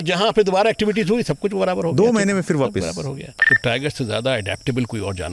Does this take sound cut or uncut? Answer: cut